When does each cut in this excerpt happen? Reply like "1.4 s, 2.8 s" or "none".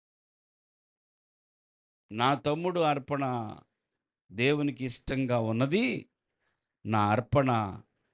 none